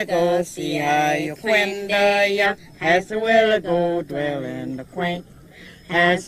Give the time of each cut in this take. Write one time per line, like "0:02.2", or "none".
none